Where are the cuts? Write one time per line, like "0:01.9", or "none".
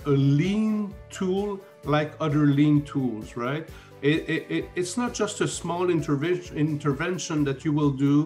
none